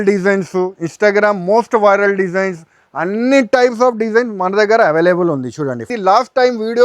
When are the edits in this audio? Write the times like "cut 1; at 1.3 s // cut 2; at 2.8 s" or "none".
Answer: cut 1; at 5.9 s